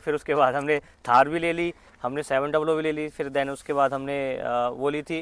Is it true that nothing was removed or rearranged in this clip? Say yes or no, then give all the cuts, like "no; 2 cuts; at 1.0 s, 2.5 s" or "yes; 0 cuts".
yes; 0 cuts